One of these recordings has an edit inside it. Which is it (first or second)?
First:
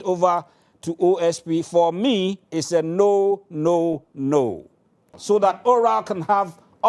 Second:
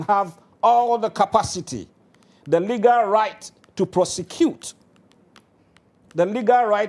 first